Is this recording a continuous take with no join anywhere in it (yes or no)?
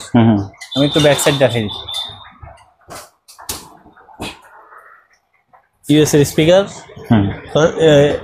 yes